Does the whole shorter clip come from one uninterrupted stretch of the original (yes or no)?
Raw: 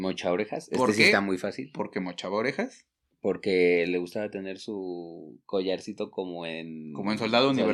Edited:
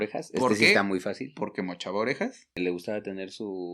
no